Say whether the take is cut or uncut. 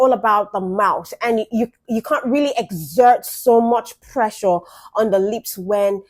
uncut